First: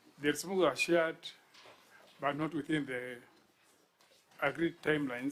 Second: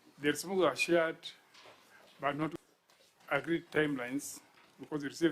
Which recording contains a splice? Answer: second; 1 cut; at 2.5 s

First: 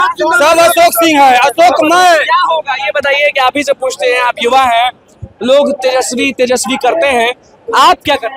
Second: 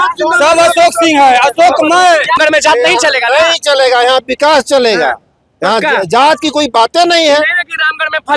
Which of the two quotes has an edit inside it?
second; 1 cut; at 2.4 s

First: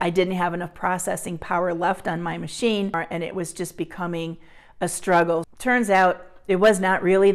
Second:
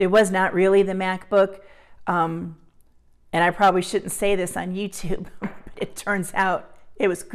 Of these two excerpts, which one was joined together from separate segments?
first; 2 cuts; at 3.0 s, 5.5 s

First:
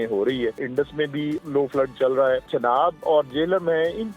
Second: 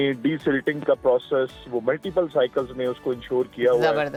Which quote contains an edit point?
first; 2 cuts; at 1.1 s, 2.5 s

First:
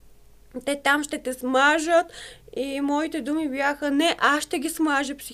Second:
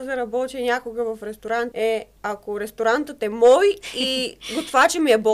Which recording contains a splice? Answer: second; 1 cut; at 1.7 s

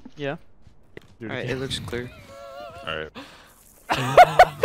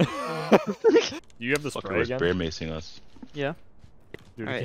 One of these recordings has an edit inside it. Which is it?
second; 1 cut; at 1.2 s

